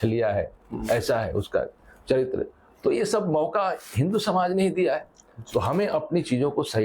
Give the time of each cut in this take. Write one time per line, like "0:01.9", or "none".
none